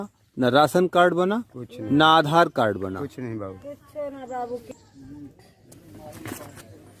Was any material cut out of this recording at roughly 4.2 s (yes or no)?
no